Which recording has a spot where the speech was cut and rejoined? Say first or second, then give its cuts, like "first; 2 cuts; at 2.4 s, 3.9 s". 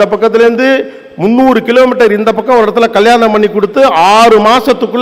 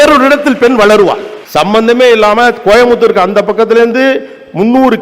second; 1 cut; at 1.3 s